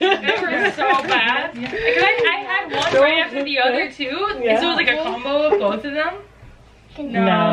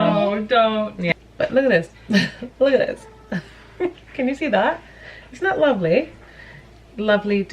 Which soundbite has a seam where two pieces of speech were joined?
second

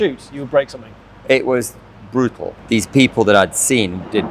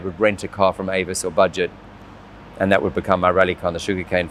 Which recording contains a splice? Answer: first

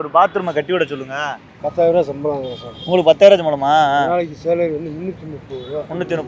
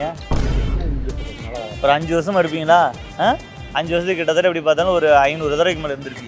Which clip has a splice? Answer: first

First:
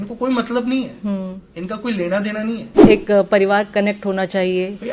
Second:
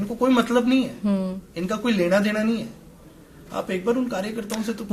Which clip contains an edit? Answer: first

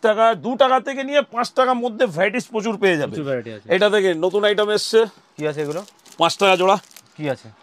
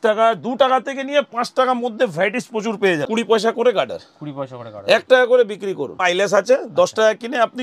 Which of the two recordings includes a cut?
second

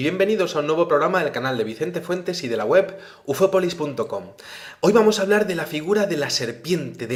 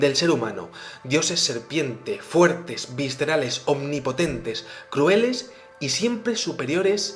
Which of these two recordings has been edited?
second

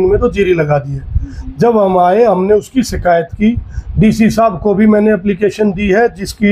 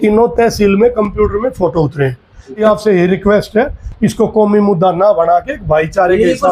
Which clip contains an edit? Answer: second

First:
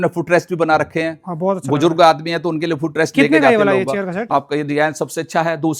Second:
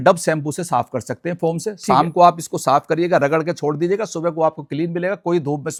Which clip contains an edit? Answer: first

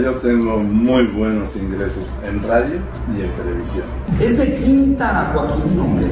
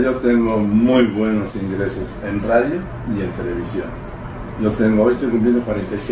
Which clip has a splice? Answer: first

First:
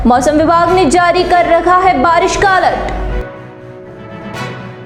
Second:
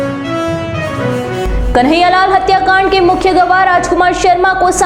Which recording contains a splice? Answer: second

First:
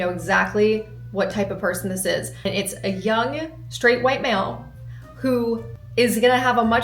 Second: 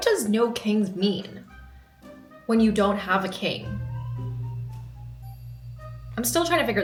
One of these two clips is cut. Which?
first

